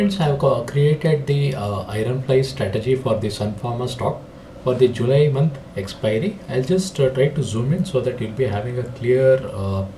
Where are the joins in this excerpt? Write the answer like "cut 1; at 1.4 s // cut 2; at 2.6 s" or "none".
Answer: none

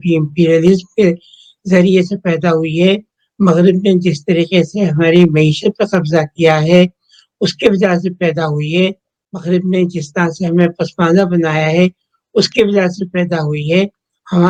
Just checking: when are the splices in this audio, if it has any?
none

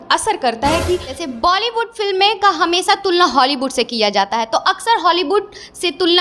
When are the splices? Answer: cut 1; at 1.2 s

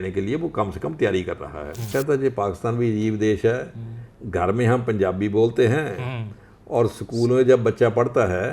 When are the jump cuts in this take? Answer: cut 1; at 1.9 s

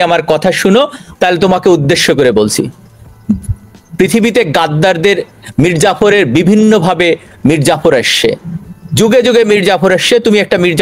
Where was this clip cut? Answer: none

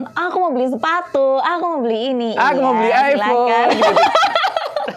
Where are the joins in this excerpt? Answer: none

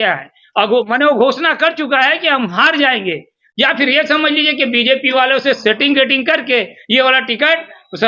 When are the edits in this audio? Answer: none

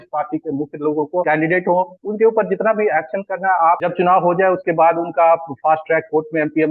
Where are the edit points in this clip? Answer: cut 1; at 1.2 s // cut 2; at 3.8 s

